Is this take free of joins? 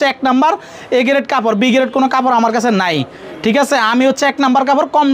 yes; 0 cuts

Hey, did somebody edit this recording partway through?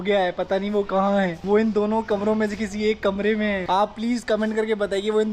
yes; 2 cuts; at 1.4 s, 3.6 s

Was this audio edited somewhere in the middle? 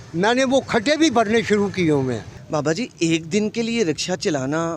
no; 0 cuts

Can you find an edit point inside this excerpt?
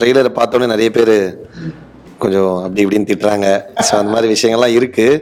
no; 0 cuts

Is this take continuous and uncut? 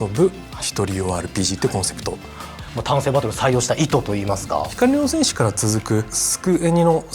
no; 3 cuts; at 2.6 s, 4.7 s, 6.2 s

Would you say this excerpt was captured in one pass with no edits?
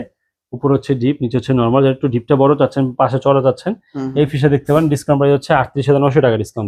yes; 0 cuts

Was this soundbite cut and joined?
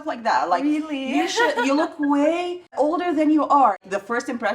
yes; 2 cuts; at 2.7 s, 3.8 s

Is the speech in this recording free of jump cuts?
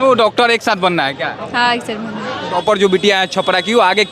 no; 1 cut; at 2.6 s

